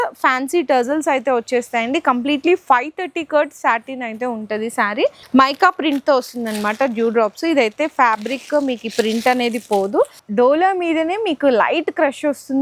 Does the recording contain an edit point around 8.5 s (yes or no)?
no